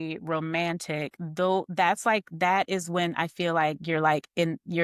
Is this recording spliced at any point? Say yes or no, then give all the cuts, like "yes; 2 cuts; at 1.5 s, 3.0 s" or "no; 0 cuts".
no; 0 cuts